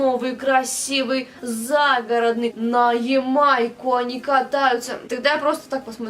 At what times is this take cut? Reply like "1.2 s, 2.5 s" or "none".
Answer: 2.6 s, 5.0 s

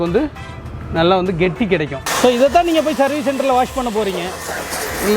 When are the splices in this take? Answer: 2.0 s

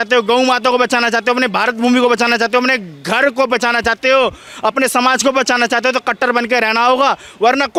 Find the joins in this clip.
none

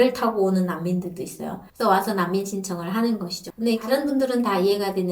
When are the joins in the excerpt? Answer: 1.7 s

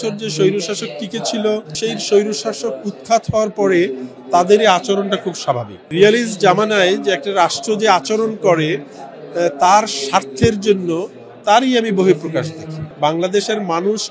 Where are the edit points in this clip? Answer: 1.7 s, 5.9 s, 12.8 s

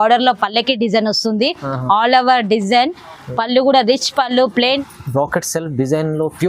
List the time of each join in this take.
4.8 s

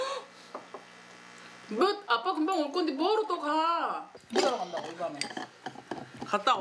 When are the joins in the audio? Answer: none

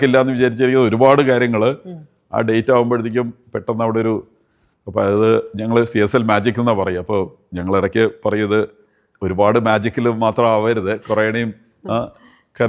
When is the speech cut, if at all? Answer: none

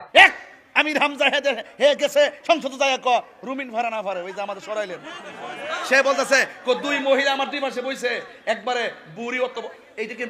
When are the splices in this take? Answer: none

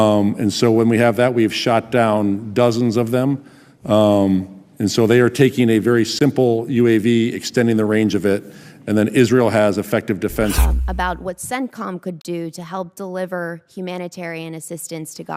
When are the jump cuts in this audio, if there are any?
10.6 s

